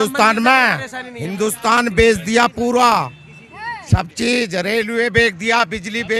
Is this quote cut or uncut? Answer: uncut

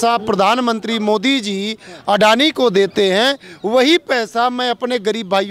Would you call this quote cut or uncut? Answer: uncut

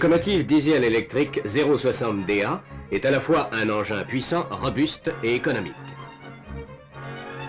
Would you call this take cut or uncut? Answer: uncut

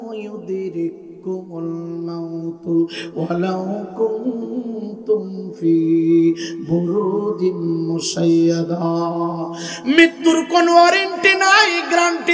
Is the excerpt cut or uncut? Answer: uncut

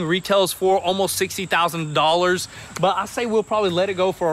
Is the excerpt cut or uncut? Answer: uncut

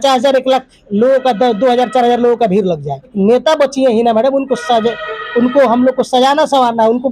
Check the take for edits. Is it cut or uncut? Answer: cut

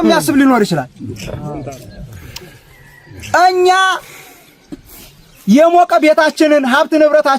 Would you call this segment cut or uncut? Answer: uncut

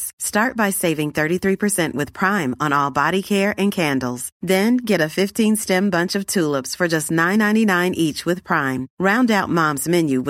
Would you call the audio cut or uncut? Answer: uncut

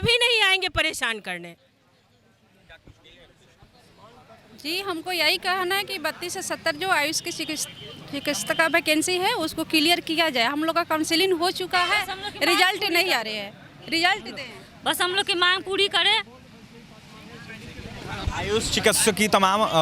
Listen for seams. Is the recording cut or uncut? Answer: uncut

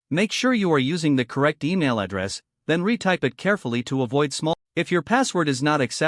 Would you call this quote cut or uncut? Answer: cut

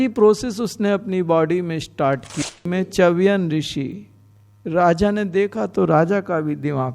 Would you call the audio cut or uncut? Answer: cut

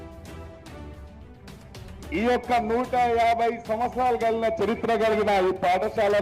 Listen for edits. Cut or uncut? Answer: uncut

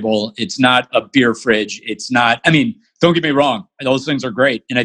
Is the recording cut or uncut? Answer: uncut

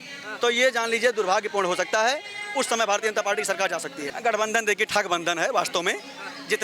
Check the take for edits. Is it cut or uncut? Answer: cut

